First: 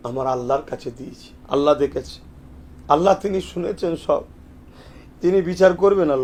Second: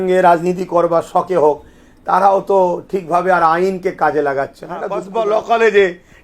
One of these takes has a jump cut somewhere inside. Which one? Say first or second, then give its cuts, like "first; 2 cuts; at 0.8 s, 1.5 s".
second; 1 cut; at 5.0 s